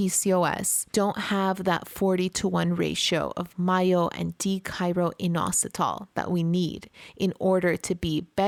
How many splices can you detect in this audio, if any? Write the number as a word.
zero